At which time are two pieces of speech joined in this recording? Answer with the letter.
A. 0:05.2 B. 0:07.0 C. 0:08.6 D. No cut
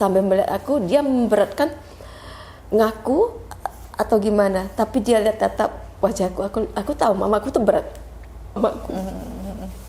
C